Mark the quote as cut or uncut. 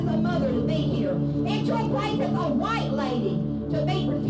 cut